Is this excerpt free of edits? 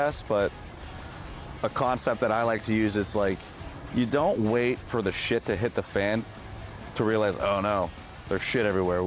yes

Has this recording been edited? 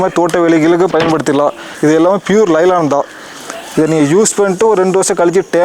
yes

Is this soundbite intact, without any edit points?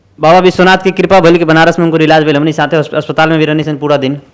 yes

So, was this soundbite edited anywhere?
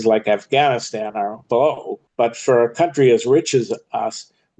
yes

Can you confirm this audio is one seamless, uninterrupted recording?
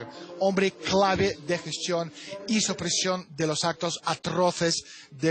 yes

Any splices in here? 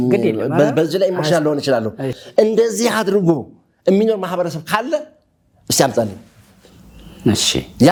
no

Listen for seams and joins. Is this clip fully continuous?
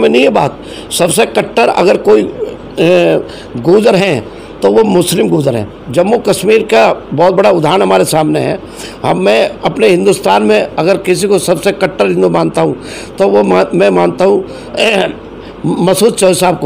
yes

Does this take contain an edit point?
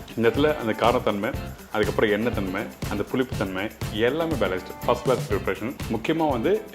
yes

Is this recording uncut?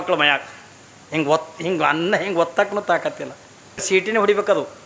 no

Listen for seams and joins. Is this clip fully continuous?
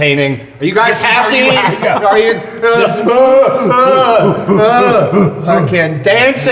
yes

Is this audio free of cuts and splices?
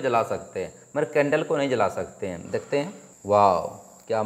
no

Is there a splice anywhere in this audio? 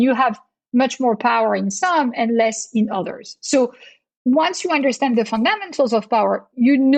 no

